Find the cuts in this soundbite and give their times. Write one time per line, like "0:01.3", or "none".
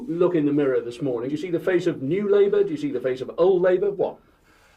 0:01.3